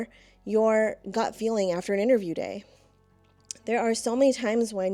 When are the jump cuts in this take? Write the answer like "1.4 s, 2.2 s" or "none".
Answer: none